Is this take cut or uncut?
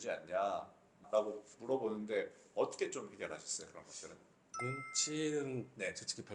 cut